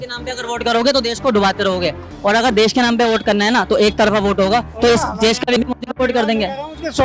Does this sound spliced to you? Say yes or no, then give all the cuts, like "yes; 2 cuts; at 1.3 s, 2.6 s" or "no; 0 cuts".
yes; 1 cut; at 5.6 s